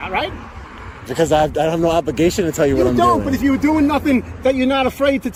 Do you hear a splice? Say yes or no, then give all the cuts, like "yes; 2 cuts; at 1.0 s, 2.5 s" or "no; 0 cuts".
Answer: no; 0 cuts